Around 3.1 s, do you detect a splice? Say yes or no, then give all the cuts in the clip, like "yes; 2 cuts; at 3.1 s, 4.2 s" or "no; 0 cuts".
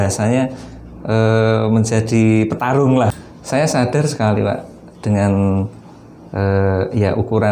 yes; 1 cut; at 3.1 s